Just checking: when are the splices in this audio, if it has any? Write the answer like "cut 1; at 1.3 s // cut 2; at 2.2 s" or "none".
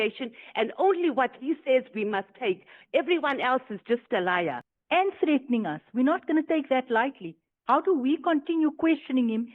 cut 1; at 4.7 s